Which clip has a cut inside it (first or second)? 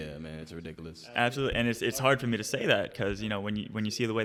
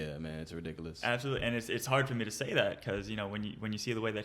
second